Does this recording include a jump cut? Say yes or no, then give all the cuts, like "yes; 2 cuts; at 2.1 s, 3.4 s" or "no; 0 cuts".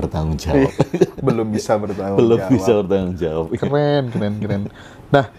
no; 0 cuts